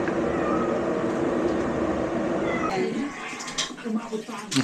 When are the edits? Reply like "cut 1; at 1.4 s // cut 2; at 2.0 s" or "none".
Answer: cut 1; at 2.7 s